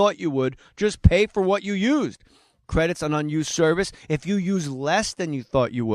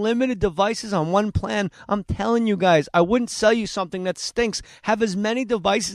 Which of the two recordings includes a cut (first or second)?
second